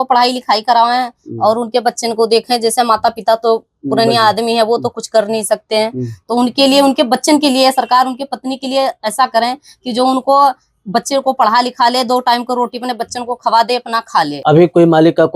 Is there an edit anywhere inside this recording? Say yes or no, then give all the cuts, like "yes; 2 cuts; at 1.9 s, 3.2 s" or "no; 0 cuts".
yes; 1 cut; at 14.4 s